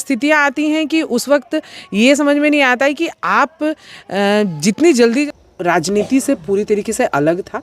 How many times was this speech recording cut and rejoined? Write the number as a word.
one